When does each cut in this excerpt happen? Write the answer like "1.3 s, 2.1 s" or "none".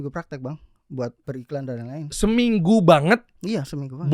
1.2 s